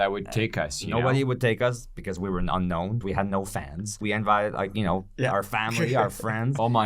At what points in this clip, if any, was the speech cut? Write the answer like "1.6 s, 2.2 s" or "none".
3.0 s, 4.0 s